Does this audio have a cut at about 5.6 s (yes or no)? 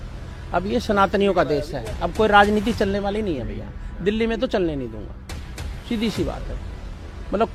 no